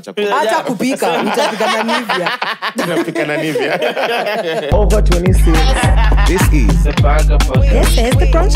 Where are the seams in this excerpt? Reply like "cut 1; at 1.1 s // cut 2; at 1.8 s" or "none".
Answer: cut 1; at 4.7 s